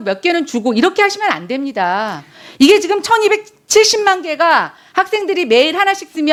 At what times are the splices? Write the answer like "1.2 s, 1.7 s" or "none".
none